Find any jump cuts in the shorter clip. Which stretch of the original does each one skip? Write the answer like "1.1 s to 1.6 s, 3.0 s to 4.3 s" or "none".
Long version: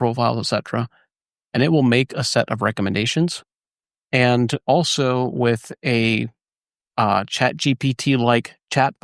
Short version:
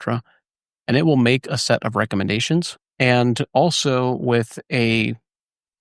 3.5 s to 3.9 s